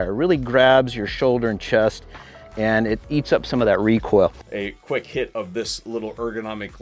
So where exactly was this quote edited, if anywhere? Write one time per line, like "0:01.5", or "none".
none

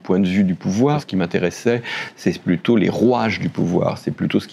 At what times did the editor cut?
0:01.0

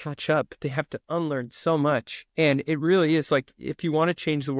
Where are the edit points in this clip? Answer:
0:02.2

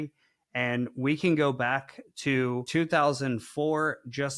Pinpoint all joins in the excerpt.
0:02.7

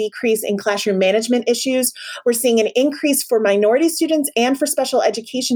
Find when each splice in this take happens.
none

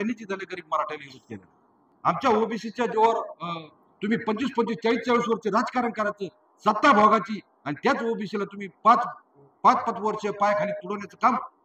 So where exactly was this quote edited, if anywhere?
0:01.8

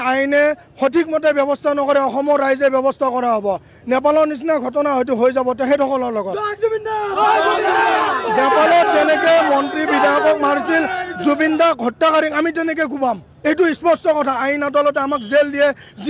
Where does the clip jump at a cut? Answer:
none

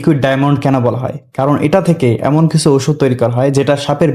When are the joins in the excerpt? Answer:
none

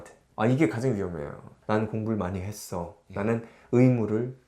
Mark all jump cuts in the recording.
0:01.5

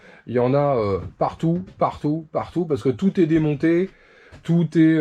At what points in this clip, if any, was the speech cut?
none

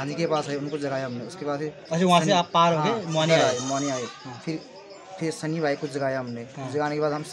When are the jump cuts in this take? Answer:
none

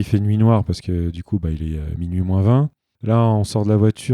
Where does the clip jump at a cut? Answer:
0:02.9

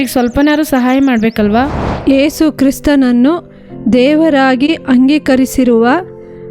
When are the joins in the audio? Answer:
0:01.8

